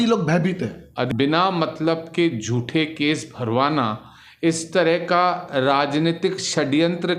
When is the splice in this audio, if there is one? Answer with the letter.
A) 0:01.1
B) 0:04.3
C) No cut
A